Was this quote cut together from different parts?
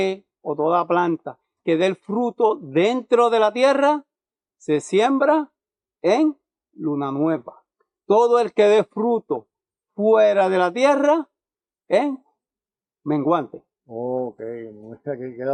no; 0 cuts

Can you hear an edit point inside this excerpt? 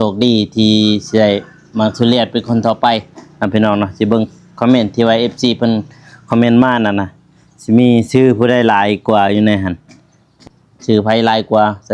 yes; 1 cut; at 10.4 s

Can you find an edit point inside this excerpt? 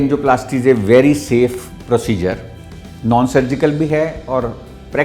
no; 0 cuts

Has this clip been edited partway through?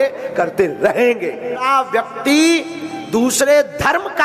yes; 1 cut; at 1.6 s

